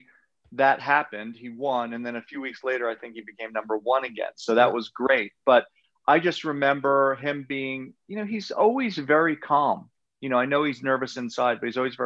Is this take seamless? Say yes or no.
yes